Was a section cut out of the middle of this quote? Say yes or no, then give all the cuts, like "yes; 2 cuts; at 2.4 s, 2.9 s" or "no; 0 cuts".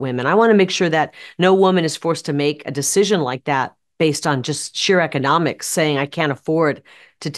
no; 0 cuts